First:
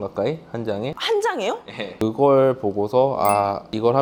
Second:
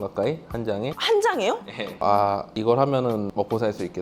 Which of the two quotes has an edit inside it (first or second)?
second